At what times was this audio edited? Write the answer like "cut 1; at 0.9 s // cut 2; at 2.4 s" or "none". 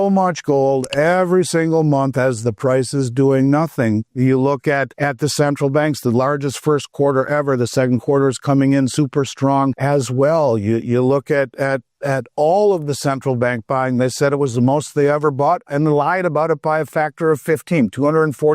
cut 1; at 4.9 s // cut 2; at 9.8 s